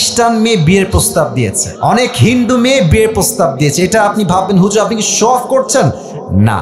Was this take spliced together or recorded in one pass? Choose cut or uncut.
cut